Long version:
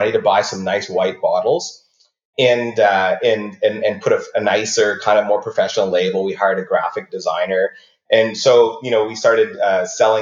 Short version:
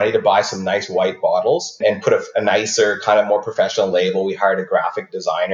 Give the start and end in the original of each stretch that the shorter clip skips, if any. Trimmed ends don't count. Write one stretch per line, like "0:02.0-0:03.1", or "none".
0:01.8-0:03.8